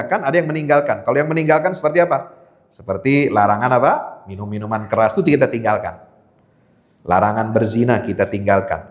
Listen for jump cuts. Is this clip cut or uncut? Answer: uncut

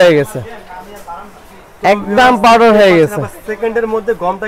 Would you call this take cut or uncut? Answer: uncut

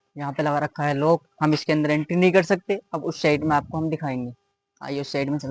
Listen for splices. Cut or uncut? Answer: uncut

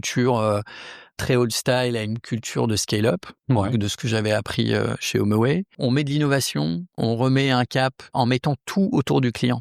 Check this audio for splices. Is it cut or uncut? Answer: cut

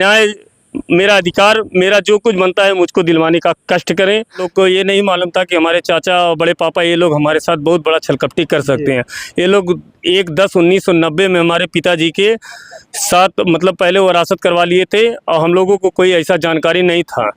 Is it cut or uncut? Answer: cut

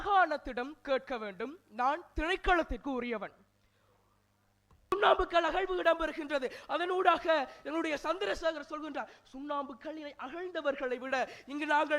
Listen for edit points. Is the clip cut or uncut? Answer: cut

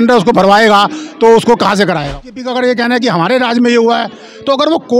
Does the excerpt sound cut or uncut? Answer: cut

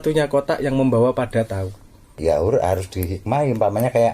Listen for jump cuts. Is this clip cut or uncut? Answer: cut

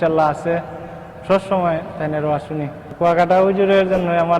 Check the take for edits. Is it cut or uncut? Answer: cut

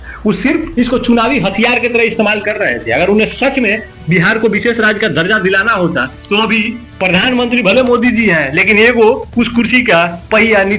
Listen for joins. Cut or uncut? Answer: uncut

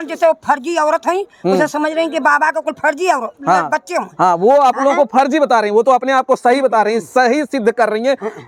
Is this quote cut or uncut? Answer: uncut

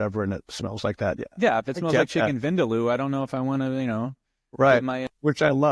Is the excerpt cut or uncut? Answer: uncut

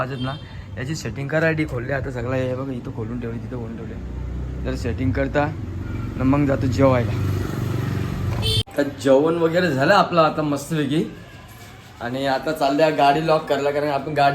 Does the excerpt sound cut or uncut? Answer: cut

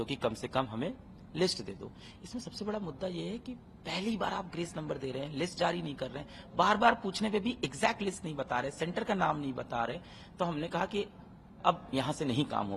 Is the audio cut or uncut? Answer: uncut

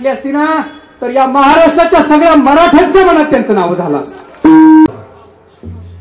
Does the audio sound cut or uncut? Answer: cut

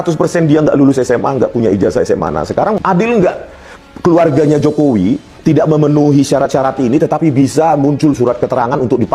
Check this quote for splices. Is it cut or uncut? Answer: cut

